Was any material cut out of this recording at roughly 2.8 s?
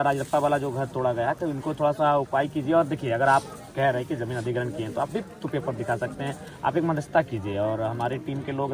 no; 0 cuts

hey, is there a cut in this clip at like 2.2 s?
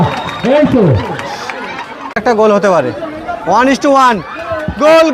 yes; 1 cut; at 2.2 s

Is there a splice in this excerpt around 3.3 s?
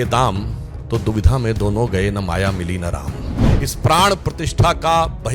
yes; 1 cut; at 3.3 s

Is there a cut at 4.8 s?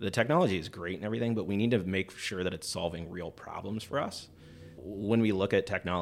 yes; 1 cut; at 4.8 s

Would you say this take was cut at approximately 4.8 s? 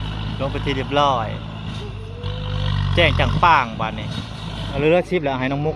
yes; 1 cut; at 4.8 s

